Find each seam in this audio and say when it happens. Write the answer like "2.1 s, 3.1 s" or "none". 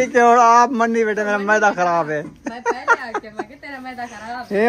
none